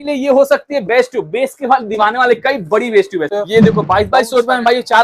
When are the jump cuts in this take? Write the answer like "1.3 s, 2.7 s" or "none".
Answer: 3.3 s